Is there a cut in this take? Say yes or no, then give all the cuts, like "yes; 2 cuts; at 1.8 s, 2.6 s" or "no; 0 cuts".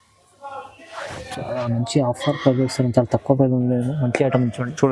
no; 0 cuts